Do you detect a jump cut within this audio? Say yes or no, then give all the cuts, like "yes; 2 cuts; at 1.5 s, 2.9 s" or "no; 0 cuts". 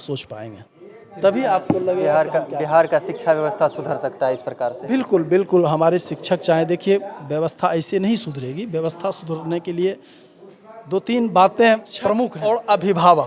yes; 1 cut; at 12.3 s